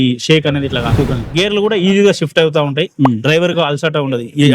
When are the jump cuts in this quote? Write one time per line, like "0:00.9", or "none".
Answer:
0:01.2